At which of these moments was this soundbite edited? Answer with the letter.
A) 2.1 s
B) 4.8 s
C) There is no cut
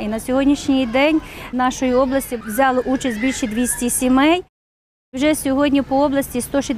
B